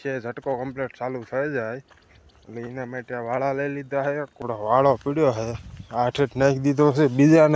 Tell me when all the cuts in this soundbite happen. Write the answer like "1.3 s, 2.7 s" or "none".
4.4 s